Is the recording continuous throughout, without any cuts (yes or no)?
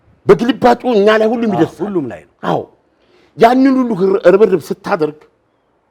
yes